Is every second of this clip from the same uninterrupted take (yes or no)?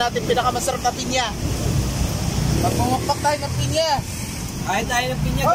yes